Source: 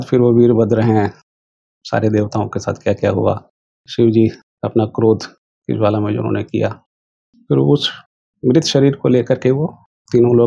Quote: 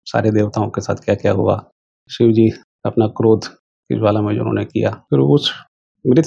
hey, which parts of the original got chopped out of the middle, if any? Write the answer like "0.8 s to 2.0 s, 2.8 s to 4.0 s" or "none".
6.8 s to 7.4 s